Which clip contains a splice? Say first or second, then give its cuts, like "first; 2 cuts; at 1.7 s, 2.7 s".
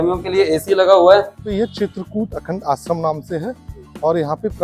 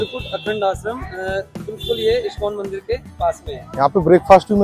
first; 1 cut; at 1.5 s